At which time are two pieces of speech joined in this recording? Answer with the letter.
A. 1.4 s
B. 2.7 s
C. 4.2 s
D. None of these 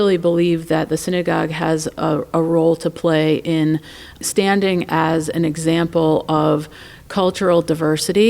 C